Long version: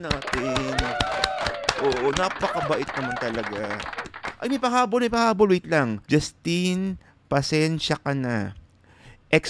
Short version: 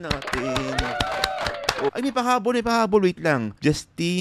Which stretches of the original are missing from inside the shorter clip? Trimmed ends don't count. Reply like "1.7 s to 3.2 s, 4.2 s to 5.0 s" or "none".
1.9 s to 4.4 s